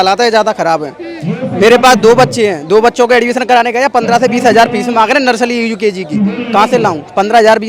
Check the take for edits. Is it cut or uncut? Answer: uncut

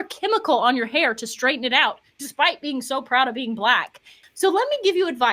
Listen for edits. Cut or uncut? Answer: cut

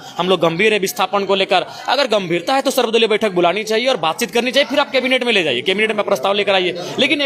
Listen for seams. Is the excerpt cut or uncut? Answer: uncut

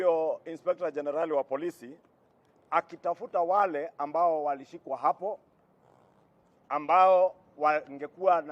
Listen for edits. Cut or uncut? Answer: cut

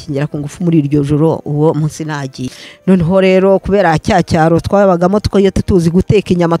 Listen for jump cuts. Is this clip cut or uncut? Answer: cut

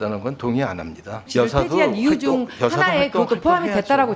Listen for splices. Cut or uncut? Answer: cut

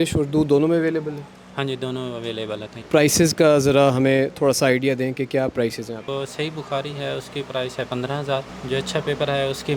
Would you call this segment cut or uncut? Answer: uncut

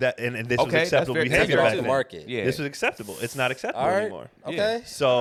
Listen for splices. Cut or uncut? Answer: uncut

